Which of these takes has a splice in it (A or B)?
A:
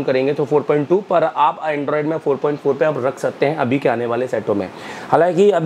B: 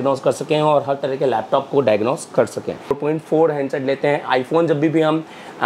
B